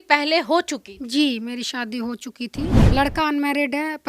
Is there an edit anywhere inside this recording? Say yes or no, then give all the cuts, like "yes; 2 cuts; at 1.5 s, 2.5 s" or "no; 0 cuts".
yes; 1 cut; at 2.9 s